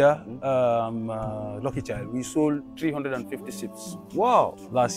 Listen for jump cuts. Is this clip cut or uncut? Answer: uncut